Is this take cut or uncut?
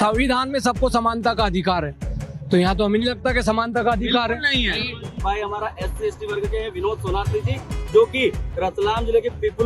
cut